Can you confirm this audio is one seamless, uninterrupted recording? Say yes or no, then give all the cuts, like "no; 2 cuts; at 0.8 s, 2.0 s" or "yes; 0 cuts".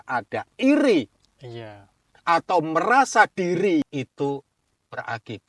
no; 1 cut; at 3.8 s